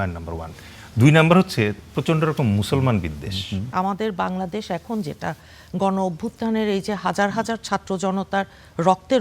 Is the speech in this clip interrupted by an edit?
yes; 1 cut; at 3.6 s

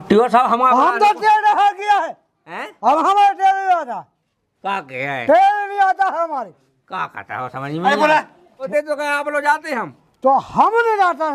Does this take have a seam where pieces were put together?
yes; 1 cut; at 8.7 s

